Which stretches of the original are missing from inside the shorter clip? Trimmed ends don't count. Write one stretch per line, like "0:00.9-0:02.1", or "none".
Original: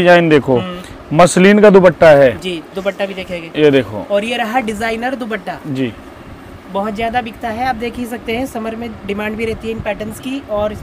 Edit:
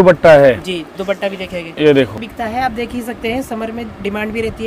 0:04.0-0:07.3